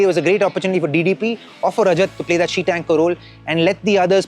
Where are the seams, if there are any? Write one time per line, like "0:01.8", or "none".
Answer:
none